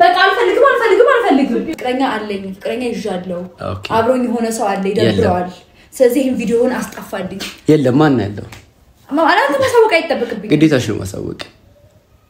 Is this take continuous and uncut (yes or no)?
no